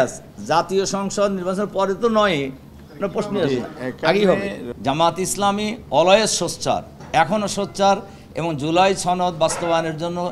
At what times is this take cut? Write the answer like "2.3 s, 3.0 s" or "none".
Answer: 4.6 s